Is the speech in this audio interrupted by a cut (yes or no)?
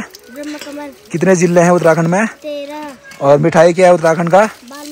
no